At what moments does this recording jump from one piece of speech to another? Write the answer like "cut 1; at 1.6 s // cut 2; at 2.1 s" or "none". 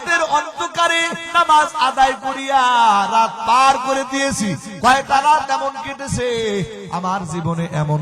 cut 1; at 1.2 s